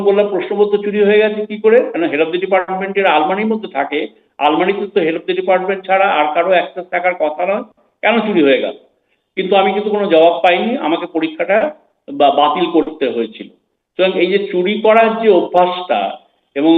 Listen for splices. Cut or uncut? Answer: uncut